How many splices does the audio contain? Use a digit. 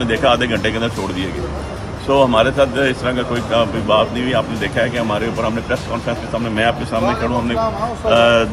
0